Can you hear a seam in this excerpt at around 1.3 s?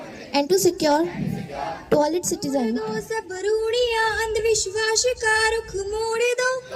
no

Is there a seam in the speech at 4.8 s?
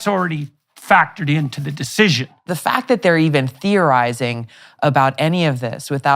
no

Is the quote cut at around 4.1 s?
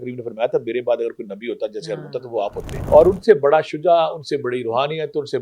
no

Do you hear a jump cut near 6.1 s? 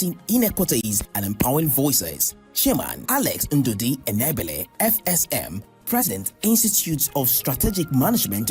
yes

